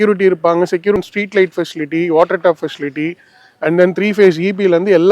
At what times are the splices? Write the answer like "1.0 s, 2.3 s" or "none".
1.0 s